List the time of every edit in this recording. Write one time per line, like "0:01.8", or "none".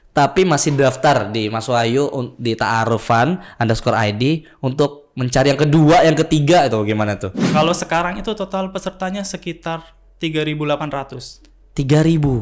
0:07.4